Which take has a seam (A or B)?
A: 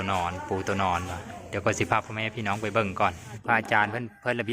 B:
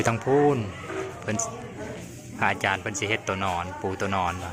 A